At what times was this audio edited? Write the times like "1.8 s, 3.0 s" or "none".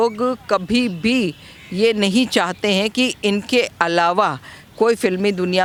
none

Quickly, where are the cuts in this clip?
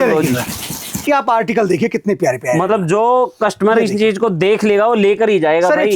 1.0 s

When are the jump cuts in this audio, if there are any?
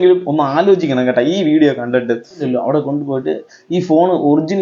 2.5 s

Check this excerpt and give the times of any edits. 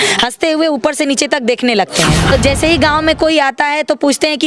2.3 s

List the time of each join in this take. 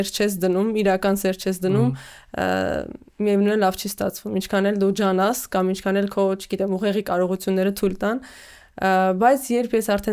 none

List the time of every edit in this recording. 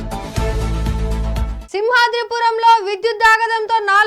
1.6 s

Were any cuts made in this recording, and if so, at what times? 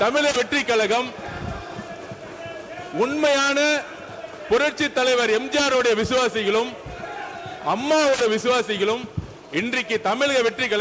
none

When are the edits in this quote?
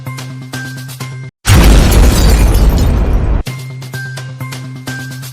1.0 s

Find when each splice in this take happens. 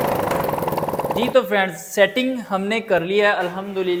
none

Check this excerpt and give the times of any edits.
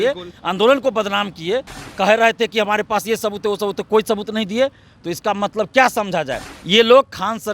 1.8 s, 6.5 s

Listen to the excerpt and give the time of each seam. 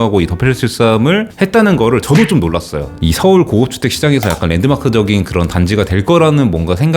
3.0 s

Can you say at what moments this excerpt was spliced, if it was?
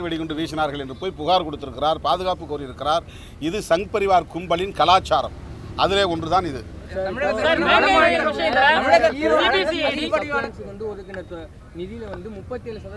none

